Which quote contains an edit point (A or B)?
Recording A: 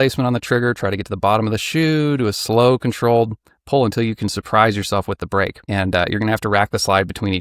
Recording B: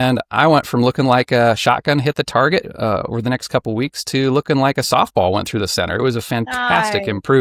A